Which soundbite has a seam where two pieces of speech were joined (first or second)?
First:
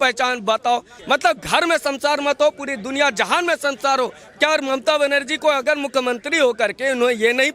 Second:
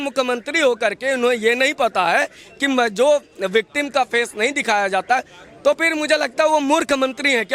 first